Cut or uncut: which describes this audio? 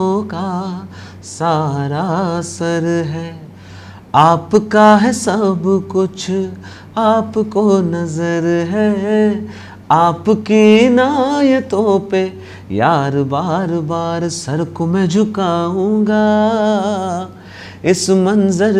uncut